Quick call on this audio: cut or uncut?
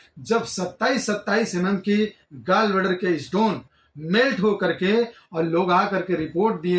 uncut